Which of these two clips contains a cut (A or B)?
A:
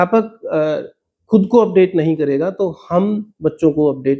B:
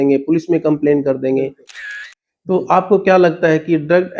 B